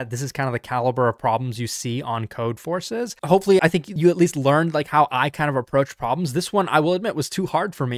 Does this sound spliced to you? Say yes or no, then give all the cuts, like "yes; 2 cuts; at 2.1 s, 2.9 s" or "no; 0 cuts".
yes; 1 cut; at 3.1 s